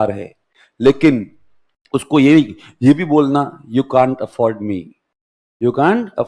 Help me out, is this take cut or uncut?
uncut